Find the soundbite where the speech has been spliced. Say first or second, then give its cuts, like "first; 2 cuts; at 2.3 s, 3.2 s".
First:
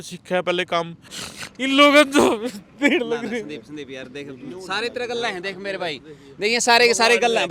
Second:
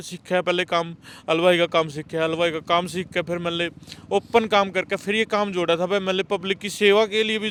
first; 1 cut; at 1.1 s